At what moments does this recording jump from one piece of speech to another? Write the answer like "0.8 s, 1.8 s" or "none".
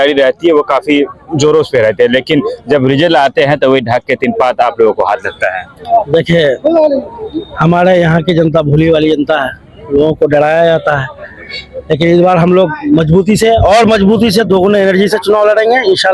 none